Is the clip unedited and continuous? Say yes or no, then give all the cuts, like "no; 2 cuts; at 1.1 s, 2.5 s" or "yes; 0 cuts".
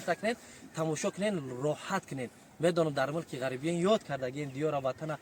yes; 0 cuts